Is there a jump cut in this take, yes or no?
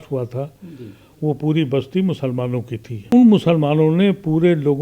yes